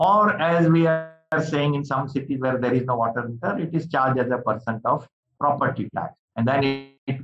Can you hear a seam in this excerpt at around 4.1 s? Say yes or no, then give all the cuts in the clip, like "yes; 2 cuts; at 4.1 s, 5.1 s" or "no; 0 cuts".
no; 1 cut; at 1.2 s